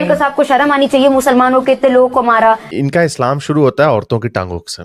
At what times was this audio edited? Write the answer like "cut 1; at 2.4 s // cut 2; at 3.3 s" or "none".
cut 1; at 2.7 s